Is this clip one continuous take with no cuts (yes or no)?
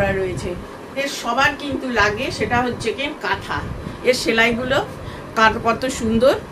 no